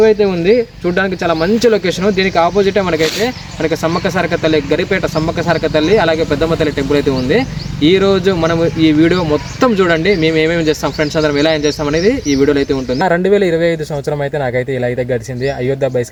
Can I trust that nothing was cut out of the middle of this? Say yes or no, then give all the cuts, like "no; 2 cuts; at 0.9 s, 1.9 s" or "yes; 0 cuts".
yes; 0 cuts